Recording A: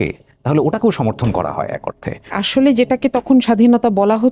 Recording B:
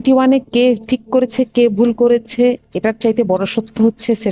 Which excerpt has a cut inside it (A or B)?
A